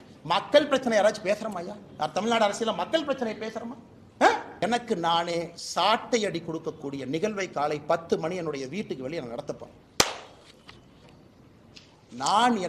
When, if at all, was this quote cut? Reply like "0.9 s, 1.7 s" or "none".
4.6 s